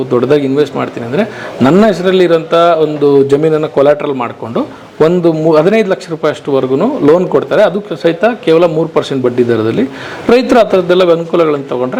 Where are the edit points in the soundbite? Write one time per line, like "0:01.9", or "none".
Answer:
none